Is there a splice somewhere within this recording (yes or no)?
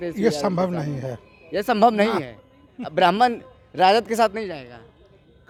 no